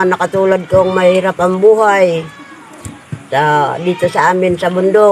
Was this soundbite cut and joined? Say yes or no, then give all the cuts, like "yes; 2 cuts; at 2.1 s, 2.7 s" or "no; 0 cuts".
no; 0 cuts